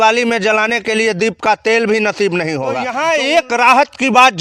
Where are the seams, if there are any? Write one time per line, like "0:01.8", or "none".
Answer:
0:02.9